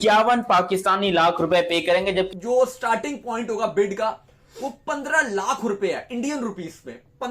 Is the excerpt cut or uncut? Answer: cut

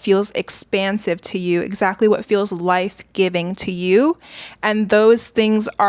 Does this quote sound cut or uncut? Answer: uncut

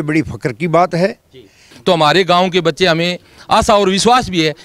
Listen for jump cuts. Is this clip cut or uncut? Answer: cut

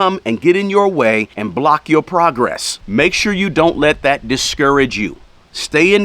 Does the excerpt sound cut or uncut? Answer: cut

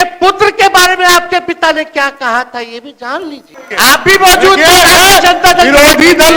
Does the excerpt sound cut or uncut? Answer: cut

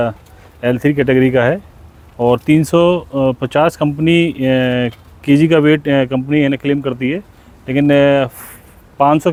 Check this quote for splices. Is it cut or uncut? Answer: uncut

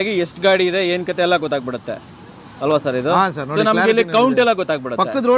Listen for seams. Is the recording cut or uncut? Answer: uncut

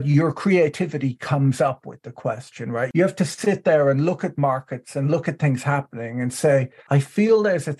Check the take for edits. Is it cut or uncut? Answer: cut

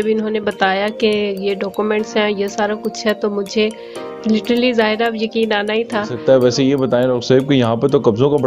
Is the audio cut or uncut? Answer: cut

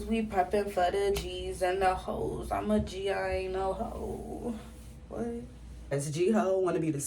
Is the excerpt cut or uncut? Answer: cut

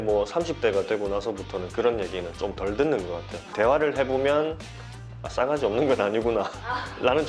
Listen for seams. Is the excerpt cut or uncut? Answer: cut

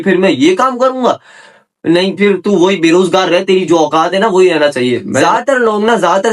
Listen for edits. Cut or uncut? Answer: cut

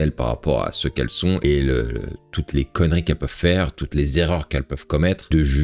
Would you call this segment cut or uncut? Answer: uncut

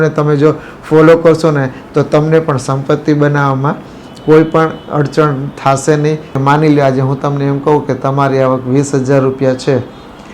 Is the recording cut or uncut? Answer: cut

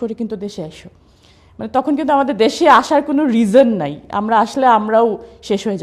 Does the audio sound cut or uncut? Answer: uncut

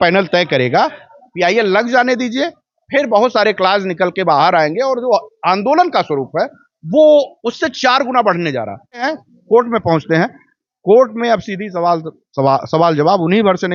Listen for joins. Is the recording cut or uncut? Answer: cut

